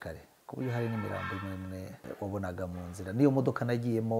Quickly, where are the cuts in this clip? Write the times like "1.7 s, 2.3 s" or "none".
2.0 s